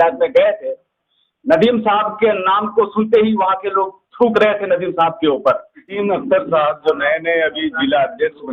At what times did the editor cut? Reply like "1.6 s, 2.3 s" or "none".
5.7 s